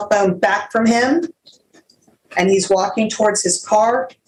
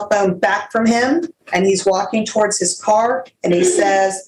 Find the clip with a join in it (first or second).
second